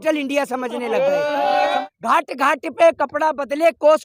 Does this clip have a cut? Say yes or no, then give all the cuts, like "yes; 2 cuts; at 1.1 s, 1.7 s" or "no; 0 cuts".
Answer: yes; 1 cut; at 1.8 s